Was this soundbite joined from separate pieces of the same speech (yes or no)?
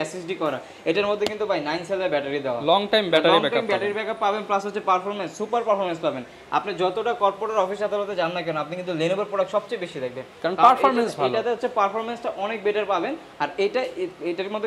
no